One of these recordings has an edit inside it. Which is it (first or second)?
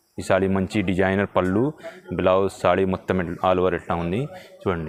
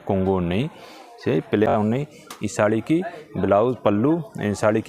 second